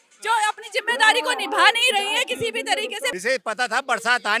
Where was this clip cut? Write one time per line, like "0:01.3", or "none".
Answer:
0:03.1